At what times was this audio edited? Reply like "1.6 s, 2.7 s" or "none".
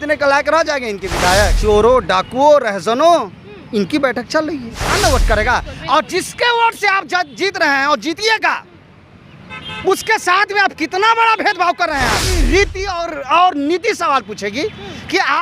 1.6 s, 4.9 s, 12.3 s